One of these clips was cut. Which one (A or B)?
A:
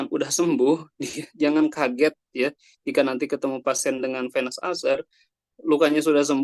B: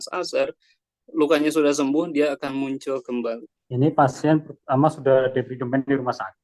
B